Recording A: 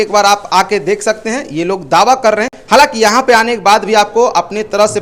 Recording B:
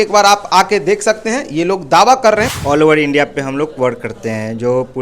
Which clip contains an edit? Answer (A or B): B